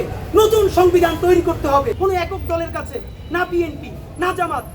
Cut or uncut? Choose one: cut